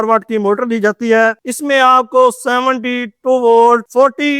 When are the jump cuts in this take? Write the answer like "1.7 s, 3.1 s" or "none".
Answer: 1.4 s